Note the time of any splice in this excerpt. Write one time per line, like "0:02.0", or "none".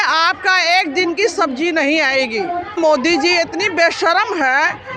0:02.8